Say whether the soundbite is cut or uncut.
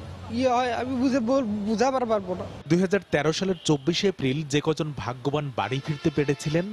uncut